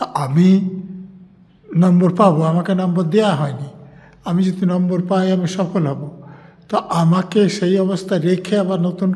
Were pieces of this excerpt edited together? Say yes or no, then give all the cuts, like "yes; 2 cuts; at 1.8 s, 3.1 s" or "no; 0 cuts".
no; 0 cuts